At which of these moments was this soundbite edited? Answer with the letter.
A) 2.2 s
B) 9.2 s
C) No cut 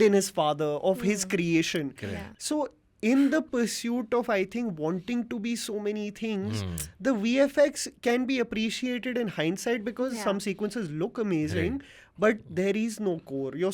A